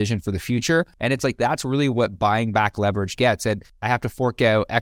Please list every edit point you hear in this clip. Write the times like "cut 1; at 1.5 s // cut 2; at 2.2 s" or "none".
cut 1; at 0.9 s // cut 2; at 3.7 s